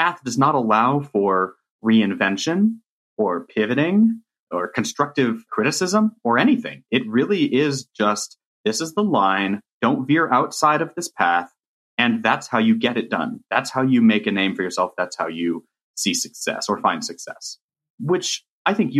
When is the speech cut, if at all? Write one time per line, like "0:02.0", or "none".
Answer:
0:04.4
0:05.5
0:09.8
0:18.0